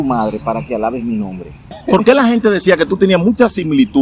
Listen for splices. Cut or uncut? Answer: cut